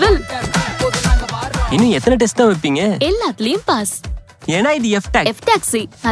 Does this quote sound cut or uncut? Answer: uncut